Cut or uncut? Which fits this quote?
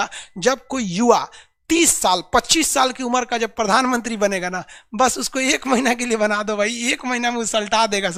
uncut